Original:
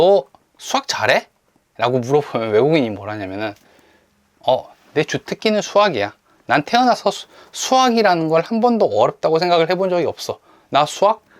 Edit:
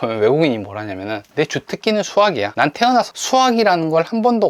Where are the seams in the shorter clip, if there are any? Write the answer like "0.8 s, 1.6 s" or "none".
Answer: 1.2 s, 2.8 s